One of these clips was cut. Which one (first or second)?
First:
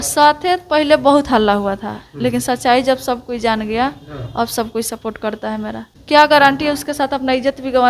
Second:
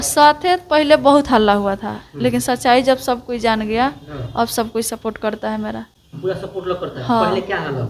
first